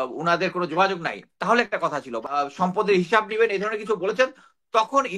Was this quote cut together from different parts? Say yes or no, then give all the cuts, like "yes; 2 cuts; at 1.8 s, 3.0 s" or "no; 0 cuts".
yes; 1 cut; at 2.3 s